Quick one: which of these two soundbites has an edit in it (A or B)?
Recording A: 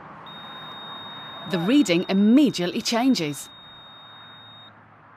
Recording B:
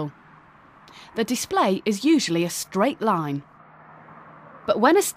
A